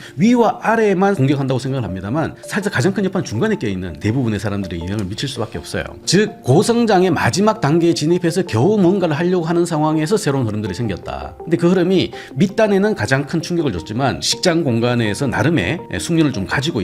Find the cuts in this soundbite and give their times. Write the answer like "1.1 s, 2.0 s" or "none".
1.2 s, 4.0 s, 6.0 s, 14.2 s